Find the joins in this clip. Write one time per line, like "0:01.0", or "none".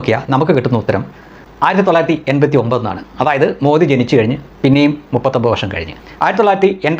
0:05.9